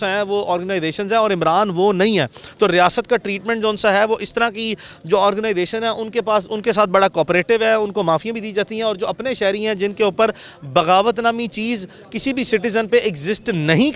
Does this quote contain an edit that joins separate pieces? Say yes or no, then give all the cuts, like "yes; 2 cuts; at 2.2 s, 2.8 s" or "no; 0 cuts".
no; 0 cuts